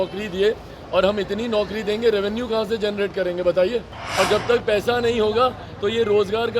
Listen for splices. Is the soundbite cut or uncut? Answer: cut